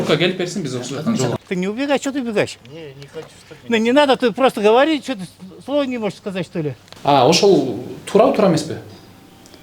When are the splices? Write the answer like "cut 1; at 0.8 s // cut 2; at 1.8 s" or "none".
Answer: cut 1; at 1.4 s // cut 2; at 6.8 s